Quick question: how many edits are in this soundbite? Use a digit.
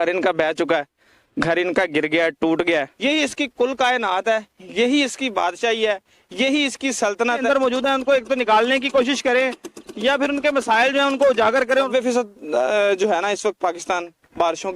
3